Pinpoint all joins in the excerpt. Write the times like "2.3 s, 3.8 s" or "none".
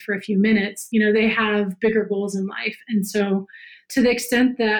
0.8 s, 3.8 s